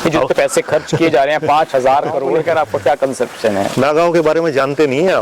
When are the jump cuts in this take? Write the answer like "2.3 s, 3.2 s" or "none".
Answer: 2.3 s